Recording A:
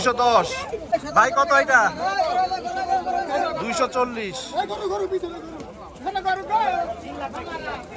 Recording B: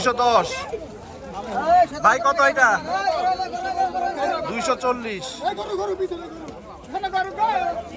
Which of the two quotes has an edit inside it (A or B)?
A